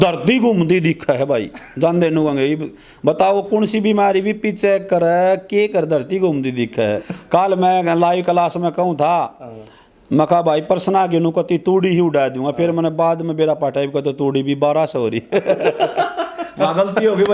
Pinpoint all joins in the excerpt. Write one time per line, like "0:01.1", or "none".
0:07.1

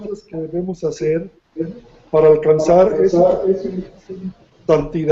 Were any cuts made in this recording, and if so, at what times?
0:00.9

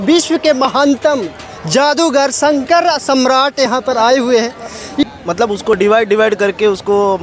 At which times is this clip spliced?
0:05.0

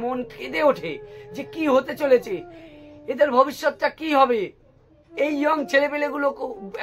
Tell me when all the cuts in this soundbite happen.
none

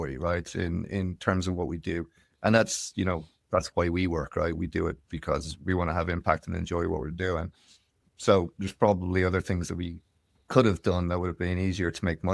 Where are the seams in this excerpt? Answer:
none

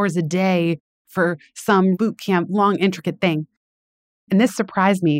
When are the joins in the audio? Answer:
0:01.9

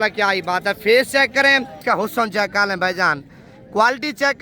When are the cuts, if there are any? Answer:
0:01.8

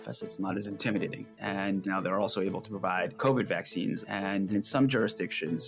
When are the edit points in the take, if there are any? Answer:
0:01.5
0:04.2

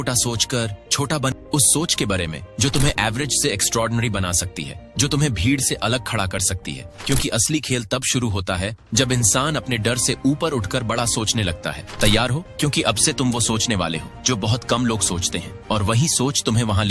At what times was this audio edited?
0:01.4

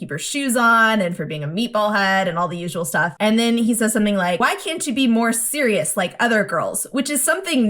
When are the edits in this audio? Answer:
0:03.1
0:04.4

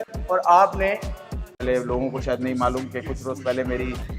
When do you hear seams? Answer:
0:01.5

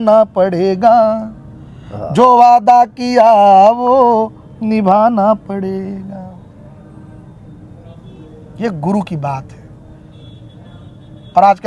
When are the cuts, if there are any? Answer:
none

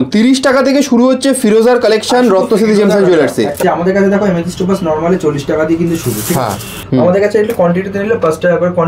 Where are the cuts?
0:03.6
0:06.7

